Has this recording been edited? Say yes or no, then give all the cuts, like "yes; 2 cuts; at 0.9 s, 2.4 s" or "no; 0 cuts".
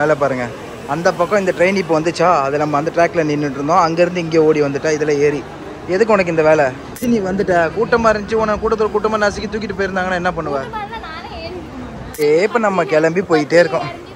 yes; 2 cuts; at 7.0 s, 12.2 s